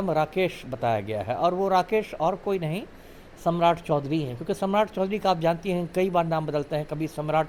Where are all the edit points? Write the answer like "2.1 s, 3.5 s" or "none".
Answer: none